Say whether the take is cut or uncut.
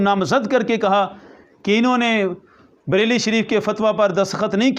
uncut